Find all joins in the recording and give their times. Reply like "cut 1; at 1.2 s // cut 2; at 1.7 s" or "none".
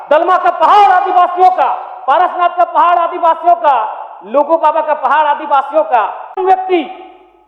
cut 1; at 6.4 s